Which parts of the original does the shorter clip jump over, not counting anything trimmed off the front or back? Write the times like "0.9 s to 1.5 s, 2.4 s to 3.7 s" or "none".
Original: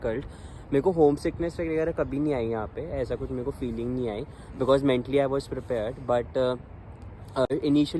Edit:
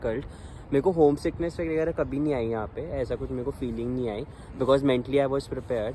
none